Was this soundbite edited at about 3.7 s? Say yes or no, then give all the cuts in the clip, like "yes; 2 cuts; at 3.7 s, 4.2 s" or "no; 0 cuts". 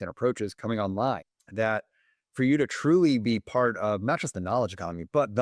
no; 1 cut; at 1.4 s